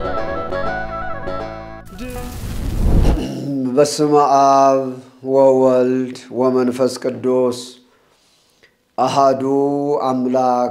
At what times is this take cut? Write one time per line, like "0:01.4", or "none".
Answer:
0:02.2
0:03.5